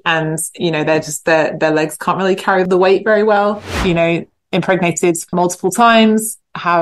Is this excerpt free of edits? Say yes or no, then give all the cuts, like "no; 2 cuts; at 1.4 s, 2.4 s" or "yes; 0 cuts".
no; 3 cuts; at 2.7 s, 3.7 s, 5.3 s